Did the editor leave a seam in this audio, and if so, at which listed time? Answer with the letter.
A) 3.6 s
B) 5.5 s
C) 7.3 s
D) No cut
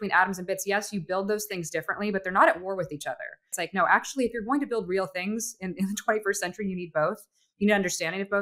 A